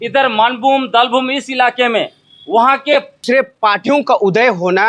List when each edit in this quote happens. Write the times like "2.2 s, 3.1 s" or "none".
3.2 s